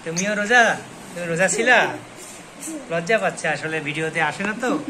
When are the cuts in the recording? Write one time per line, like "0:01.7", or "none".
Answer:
none